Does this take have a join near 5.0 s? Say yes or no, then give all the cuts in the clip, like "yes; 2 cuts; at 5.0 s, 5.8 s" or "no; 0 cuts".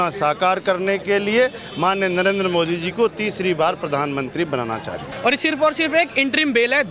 yes; 1 cut; at 5.0 s